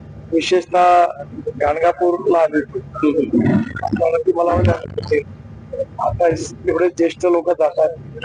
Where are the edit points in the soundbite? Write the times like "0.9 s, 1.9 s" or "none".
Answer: none